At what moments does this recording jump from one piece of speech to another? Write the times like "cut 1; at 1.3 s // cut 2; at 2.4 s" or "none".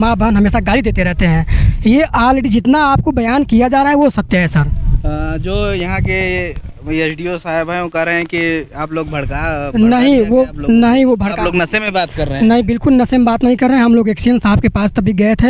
none